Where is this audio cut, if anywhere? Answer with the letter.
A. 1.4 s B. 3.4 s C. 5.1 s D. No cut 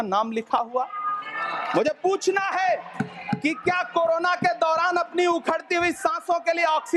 D